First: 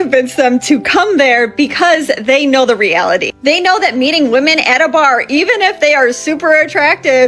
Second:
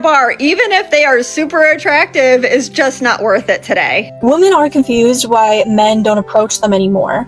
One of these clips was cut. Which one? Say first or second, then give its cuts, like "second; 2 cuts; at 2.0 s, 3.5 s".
second; 1 cut; at 4.1 s